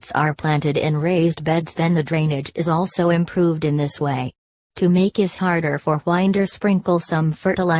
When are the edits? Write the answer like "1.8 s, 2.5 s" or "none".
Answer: none